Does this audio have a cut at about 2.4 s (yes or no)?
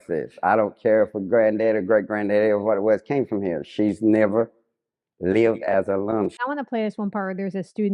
no